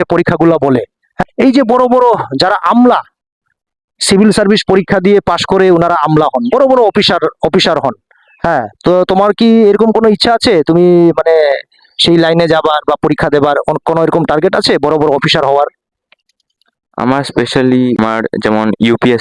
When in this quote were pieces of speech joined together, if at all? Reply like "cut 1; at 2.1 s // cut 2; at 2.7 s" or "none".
none